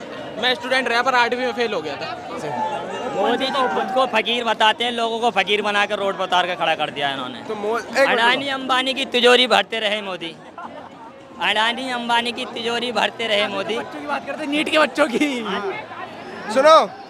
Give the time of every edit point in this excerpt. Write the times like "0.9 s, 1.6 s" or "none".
2.4 s